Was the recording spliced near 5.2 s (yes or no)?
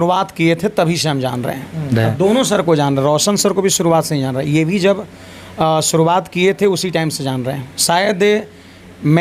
no